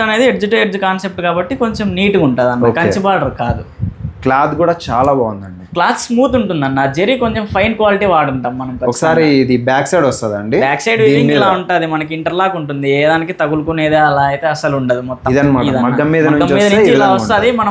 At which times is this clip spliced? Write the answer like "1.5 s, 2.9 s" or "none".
15.2 s